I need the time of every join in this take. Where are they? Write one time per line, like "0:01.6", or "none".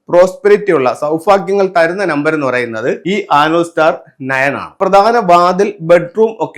0:03.0
0:04.8